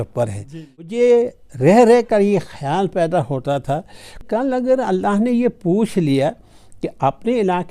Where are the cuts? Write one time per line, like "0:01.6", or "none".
0:01.0
0:04.2